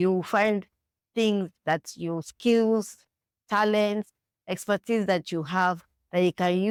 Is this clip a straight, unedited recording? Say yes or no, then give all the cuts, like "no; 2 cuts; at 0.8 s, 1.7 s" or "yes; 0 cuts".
yes; 0 cuts